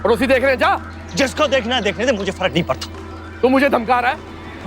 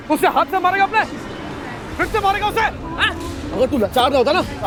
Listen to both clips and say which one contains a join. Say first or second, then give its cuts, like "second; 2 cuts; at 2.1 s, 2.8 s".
first; 2 cuts; at 0.9 s, 3.3 s